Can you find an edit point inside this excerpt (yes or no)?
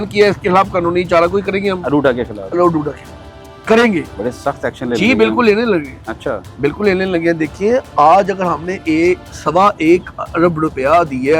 no